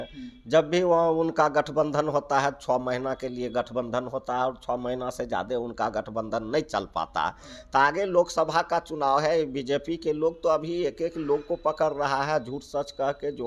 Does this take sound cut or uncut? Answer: uncut